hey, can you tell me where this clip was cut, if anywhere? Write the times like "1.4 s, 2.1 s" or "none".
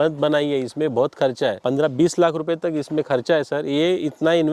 none